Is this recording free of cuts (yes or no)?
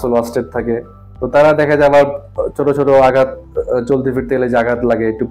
yes